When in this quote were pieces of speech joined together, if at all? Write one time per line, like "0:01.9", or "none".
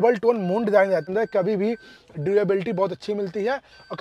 0:01.0